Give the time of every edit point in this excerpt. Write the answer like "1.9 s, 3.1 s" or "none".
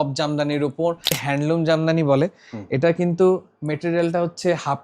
1.2 s